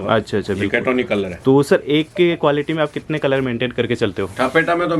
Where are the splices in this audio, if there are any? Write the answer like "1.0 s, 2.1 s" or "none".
none